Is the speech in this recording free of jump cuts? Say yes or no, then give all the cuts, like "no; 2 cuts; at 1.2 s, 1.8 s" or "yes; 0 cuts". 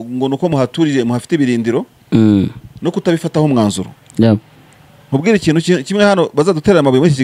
yes; 0 cuts